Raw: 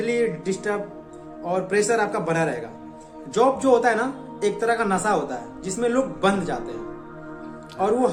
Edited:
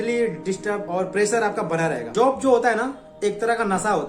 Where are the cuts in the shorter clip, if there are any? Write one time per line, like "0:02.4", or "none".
0:00.8
0:02.0